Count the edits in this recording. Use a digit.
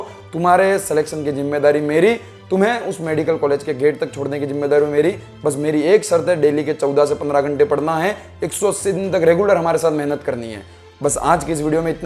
0